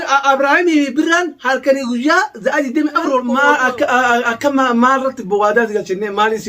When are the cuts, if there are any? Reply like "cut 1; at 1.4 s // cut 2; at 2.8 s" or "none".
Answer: cut 1; at 3.3 s